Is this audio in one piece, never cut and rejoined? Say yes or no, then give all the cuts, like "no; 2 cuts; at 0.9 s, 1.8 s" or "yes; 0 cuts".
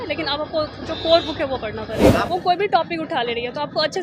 no; 1 cut; at 2.3 s